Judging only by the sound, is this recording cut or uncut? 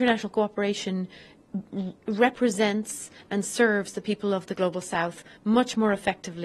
uncut